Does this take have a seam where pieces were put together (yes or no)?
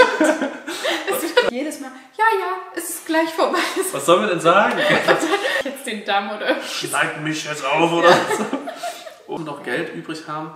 yes